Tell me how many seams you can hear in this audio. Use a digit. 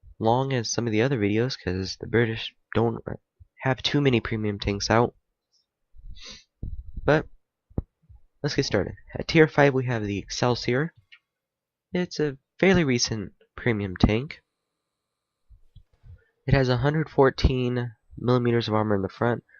1